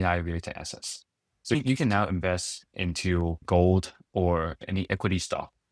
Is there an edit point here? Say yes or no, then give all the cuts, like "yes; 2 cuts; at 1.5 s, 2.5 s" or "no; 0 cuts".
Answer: yes; 3 cuts; at 1.5 s, 3.4 s, 4.6 s